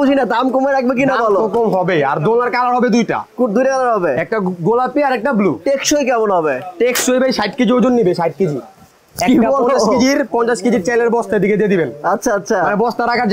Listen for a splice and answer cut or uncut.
uncut